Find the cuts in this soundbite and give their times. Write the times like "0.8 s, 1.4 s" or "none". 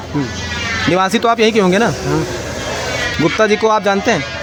none